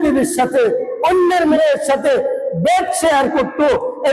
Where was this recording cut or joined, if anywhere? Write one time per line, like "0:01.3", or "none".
0:01.5